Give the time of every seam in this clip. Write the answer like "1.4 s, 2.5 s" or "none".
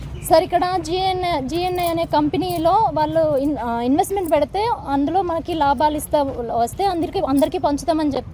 none